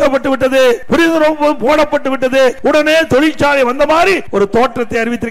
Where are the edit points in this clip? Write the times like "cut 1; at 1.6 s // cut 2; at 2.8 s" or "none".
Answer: cut 1; at 0.8 s // cut 2; at 2.6 s // cut 3; at 4.2 s